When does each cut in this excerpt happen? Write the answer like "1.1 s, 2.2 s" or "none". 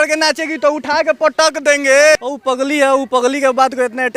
2.2 s